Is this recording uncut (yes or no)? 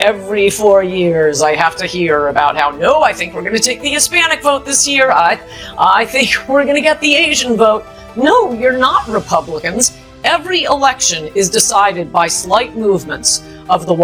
yes